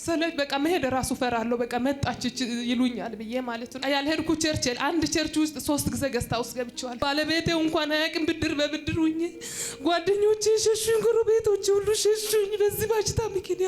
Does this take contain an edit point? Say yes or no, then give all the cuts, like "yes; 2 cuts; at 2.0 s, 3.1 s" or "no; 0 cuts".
yes; 2 cuts; at 3.8 s, 6.9 s